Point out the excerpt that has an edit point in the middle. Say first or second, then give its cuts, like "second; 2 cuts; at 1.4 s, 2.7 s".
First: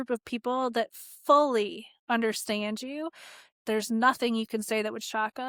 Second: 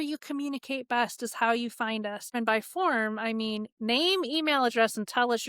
second; 1 cut; at 2.3 s